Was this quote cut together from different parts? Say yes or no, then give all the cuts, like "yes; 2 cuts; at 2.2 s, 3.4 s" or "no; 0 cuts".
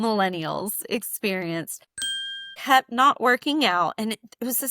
yes; 1 cut; at 2.2 s